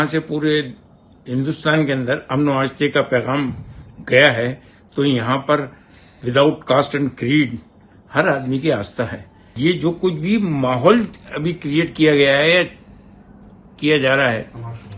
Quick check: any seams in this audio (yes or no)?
yes